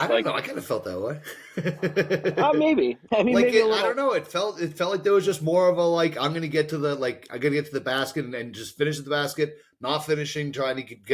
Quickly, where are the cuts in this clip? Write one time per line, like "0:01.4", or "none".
0:03.0